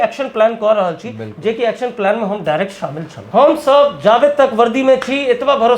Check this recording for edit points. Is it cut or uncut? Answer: cut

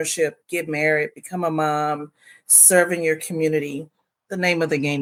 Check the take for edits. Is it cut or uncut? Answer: uncut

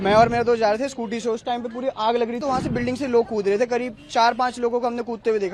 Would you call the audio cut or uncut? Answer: cut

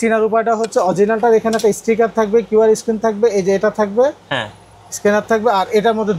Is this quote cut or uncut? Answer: uncut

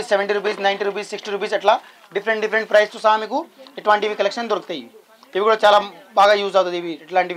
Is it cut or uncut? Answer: uncut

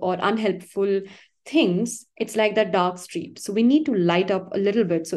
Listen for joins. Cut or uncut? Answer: uncut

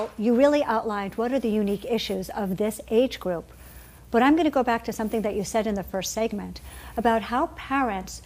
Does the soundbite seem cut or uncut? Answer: cut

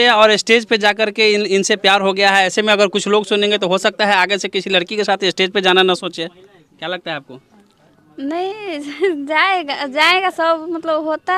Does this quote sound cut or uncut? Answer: uncut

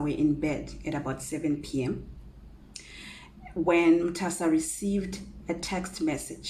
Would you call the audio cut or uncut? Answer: uncut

